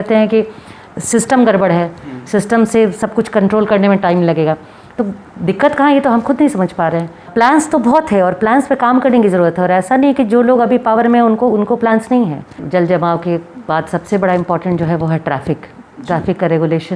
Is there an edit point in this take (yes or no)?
yes